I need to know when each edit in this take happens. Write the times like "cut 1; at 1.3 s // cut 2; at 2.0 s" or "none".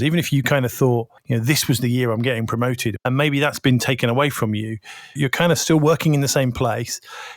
cut 1; at 1.2 s // cut 2; at 3.0 s // cut 3; at 5.2 s